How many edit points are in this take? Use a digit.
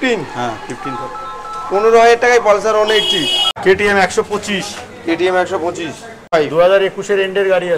2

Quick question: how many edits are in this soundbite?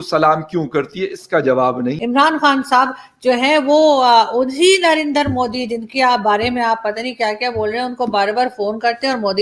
1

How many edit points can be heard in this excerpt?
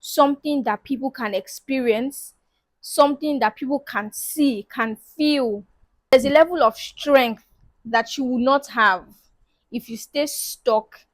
1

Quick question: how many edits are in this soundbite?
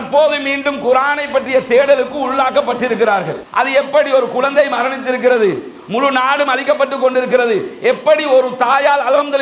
1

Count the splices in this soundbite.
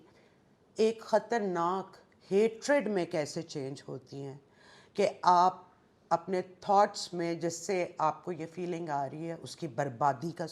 0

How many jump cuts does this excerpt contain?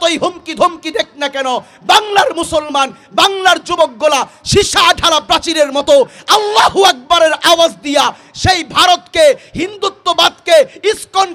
0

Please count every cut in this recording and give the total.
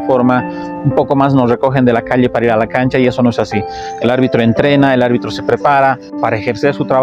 1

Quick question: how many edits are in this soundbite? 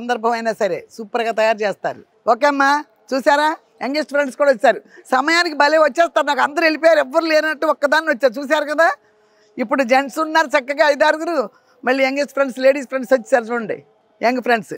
1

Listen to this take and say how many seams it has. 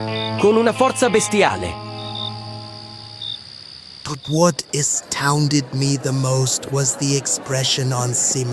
1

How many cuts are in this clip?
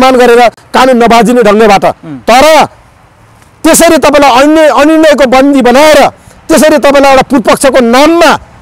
0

